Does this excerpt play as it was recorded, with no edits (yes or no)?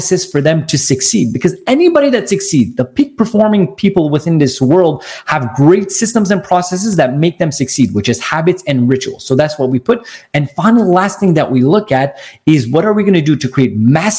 yes